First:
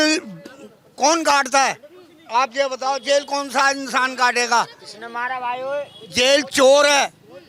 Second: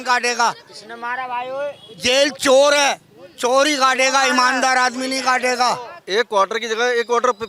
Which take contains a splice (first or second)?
second